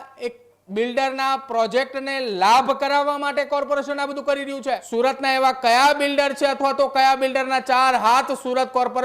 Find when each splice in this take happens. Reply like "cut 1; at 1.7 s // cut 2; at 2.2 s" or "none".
cut 1; at 4.8 s